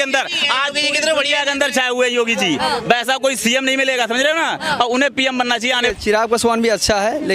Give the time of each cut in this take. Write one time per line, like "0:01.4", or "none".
0:05.8